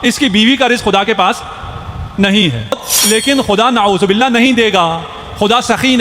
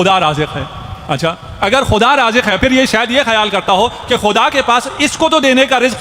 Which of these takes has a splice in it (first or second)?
first